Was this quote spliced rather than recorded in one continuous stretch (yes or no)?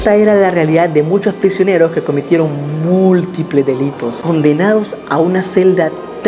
no